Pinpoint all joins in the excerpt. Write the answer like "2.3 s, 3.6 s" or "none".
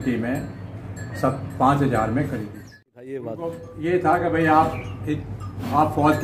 2.8 s